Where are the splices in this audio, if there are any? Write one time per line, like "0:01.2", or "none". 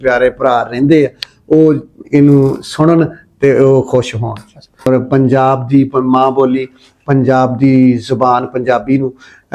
0:04.8